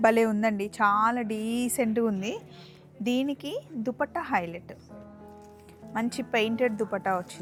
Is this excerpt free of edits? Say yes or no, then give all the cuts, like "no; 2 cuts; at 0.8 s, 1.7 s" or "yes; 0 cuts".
yes; 0 cuts